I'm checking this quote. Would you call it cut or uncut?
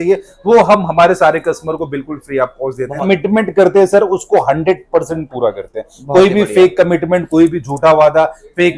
cut